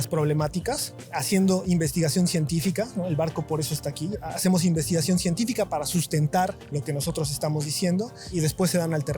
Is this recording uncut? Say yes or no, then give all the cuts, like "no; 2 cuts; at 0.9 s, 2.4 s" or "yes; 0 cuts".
no; 4 cuts; at 0.9 s, 4.1 s, 6.7 s, 8.3 s